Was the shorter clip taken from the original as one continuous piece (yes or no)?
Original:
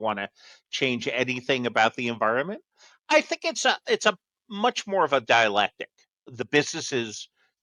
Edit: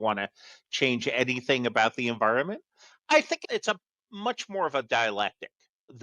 no